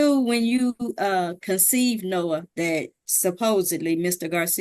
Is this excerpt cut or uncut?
cut